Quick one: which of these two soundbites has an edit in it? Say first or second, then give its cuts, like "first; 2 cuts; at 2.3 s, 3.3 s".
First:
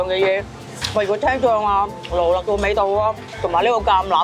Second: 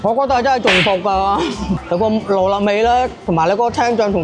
second; 1 cut; at 1.8 s